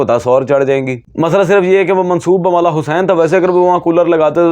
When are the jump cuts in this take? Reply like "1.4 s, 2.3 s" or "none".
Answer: 1.0 s